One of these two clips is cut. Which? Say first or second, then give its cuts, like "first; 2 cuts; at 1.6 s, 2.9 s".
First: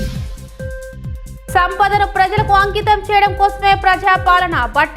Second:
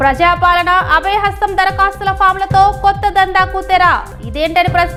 first; 1 cut; at 1.5 s